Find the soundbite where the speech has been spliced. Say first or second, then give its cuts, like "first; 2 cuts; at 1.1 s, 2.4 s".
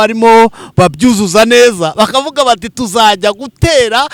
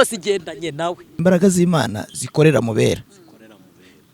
second; 1 cut; at 1.1 s